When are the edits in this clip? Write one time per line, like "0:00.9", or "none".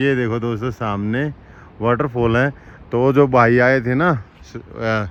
none